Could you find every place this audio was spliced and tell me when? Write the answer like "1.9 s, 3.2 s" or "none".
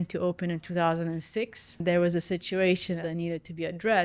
1.8 s, 3.0 s

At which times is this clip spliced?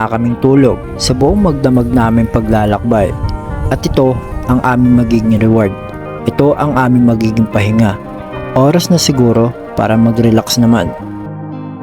none

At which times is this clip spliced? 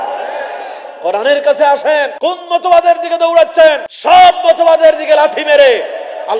2.1 s, 3.9 s

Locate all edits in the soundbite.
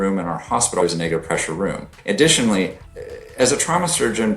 0.8 s, 1.9 s, 2.8 s

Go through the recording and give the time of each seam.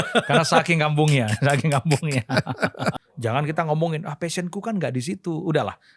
3.1 s

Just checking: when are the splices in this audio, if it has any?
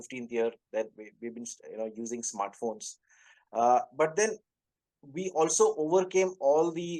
none

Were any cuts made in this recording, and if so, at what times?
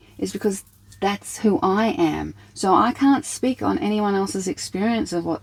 none

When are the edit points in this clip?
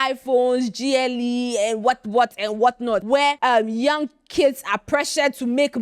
3.2 s

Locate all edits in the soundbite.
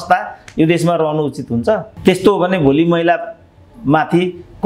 1.9 s

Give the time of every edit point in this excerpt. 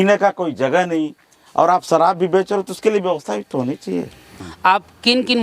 4.5 s

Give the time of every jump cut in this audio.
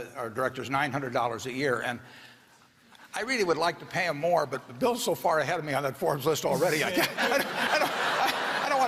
none

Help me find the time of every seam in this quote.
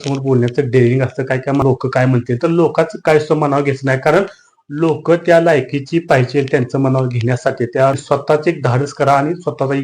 1.6 s, 8.0 s

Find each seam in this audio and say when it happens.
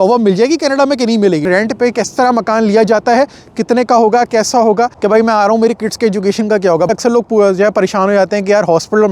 1.4 s, 5.0 s, 6.9 s

